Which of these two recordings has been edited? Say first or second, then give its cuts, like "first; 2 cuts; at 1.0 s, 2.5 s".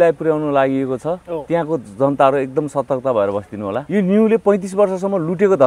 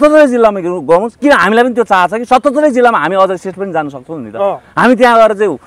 first; 1 cut; at 3.8 s